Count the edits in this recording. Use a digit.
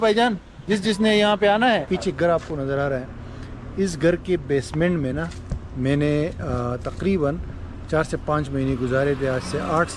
1